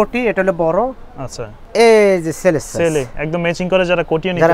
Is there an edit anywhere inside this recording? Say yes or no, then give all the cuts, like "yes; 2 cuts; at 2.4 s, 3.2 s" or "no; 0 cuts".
yes; 1 cut; at 1.6 s